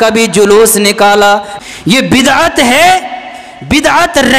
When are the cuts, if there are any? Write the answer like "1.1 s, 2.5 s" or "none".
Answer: 1.5 s

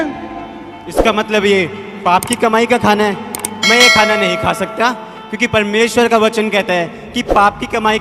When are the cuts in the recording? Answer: none

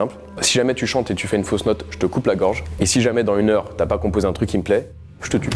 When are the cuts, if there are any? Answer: 2.7 s

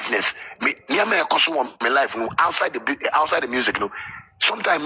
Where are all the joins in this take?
none

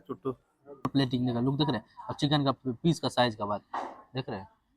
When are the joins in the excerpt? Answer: 0.9 s

